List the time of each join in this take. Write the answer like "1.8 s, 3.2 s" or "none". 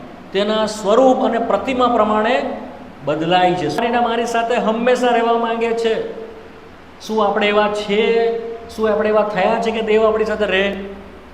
3.8 s